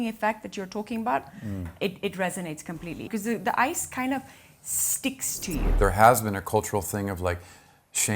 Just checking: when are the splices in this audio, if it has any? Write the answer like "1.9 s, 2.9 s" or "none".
3.0 s, 5.7 s